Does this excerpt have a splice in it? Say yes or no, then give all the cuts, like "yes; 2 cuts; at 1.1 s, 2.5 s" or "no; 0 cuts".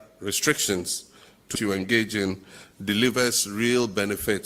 yes; 1 cut; at 1.6 s